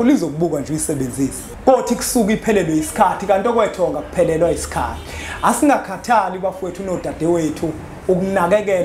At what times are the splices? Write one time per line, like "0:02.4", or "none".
0:01.5

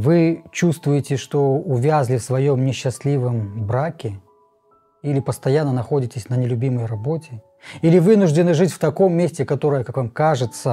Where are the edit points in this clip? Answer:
none

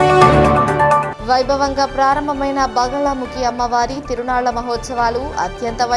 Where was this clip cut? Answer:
0:01.0

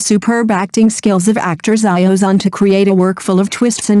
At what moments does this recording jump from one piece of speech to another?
0:02.9

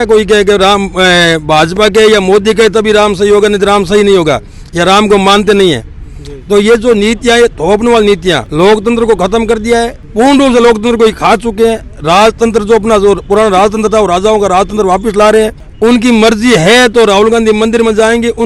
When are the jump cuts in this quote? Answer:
none

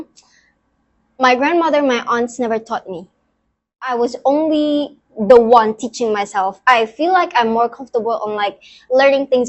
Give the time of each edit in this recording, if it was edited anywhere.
0:03.9

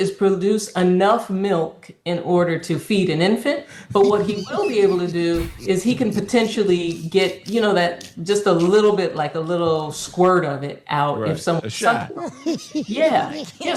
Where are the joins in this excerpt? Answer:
none

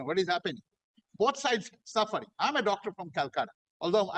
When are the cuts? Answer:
none

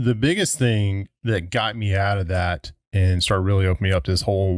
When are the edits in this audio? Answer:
none

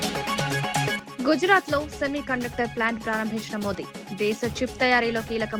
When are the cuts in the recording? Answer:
0:00.9

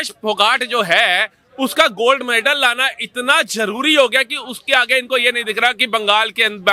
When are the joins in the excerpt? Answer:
none

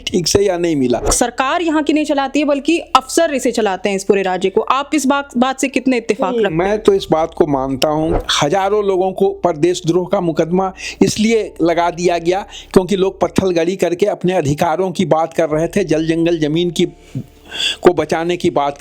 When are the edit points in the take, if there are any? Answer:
0:01.1
0:08.1

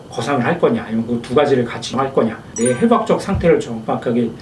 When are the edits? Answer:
none

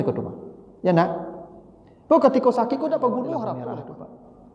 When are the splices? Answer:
0:03.6

